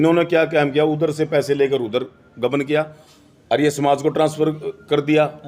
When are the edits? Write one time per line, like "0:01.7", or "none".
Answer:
none